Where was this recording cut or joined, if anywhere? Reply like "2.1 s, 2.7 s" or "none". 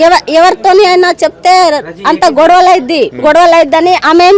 3.1 s